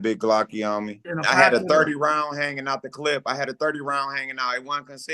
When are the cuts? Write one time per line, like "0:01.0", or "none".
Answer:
0:01.0